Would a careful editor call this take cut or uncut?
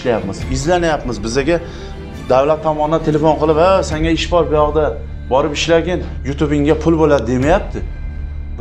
uncut